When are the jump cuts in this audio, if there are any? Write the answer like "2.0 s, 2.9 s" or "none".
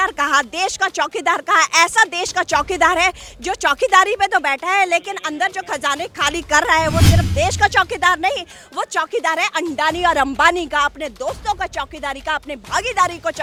none